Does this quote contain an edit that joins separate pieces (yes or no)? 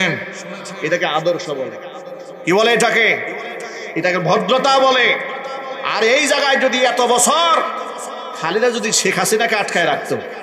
no